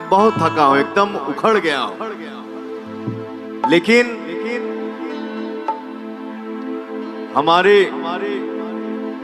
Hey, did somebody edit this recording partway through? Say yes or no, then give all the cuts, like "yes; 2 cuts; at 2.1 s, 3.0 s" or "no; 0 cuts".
no; 0 cuts